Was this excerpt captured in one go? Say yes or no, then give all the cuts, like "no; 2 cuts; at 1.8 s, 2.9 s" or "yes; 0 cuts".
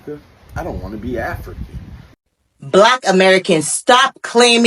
no; 1 cut; at 2.1 s